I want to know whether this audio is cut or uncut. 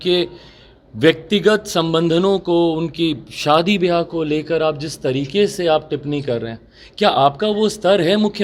uncut